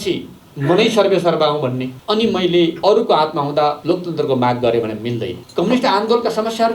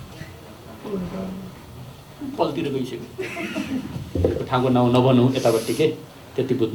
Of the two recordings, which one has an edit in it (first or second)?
first